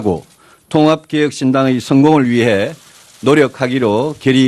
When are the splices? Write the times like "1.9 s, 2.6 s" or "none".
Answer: none